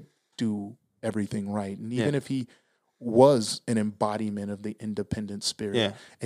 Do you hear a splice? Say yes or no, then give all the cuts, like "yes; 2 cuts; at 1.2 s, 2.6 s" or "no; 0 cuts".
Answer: no; 0 cuts